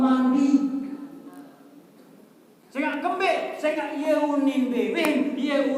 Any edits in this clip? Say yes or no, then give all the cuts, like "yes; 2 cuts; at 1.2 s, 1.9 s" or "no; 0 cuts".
no; 0 cuts